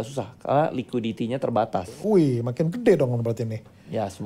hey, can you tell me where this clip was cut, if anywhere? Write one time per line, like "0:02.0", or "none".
0:01.9

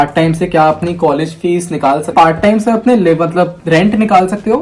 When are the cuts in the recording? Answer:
0:02.1

